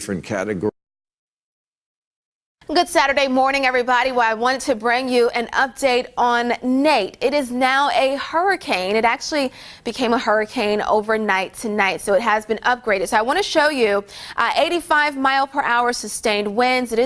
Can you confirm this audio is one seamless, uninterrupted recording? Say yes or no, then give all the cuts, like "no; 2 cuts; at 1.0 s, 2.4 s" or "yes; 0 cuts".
yes; 0 cuts